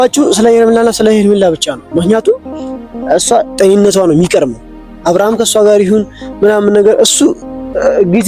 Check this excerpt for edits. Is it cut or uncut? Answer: uncut